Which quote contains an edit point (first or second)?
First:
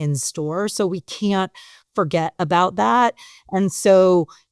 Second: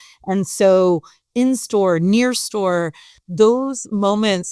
second